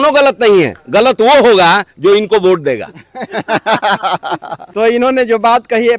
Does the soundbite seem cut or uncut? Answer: uncut